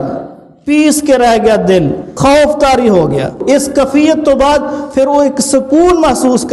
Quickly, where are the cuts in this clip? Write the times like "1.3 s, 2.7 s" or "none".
2.1 s, 3.4 s